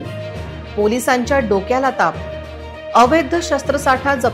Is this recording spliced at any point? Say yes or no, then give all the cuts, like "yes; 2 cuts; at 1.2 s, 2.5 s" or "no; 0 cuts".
no; 0 cuts